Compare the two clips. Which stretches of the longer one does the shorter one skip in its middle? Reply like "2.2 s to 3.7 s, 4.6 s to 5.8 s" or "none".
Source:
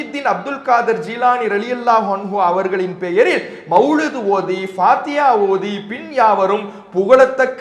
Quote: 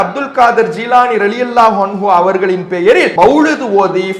3.4 s to 3.6 s

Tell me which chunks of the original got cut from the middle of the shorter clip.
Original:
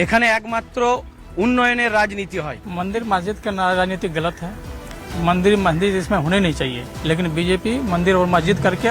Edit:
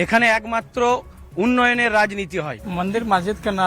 none

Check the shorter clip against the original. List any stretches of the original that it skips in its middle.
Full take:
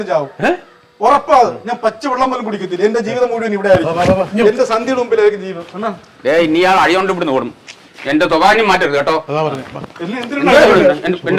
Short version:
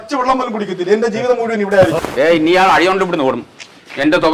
3.9 s to 6.1 s

